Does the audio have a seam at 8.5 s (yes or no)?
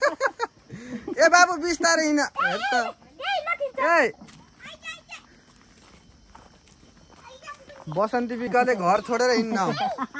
yes